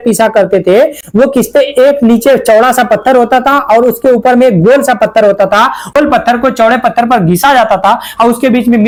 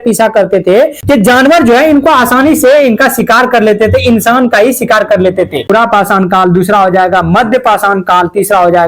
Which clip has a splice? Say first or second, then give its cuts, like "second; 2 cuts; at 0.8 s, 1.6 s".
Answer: second; 2 cuts; at 1.0 s, 5.7 s